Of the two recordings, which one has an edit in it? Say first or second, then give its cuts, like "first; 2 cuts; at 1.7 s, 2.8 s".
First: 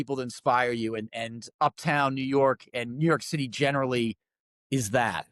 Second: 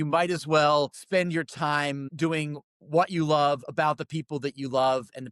second; 2 cuts; at 1.0 s, 2.1 s